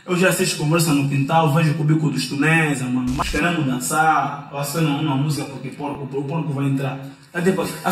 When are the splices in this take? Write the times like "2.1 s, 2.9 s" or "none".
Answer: 3.2 s